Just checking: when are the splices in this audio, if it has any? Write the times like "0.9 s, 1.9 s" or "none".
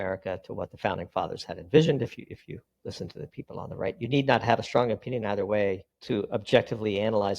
2.7 s, 5.9 s